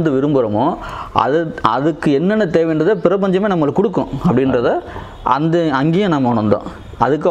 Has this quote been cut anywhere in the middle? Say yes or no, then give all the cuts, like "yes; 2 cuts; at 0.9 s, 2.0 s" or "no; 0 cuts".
no; 0 cuts